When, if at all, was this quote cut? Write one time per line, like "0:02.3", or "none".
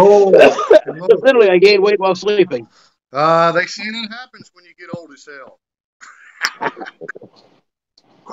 0:07.2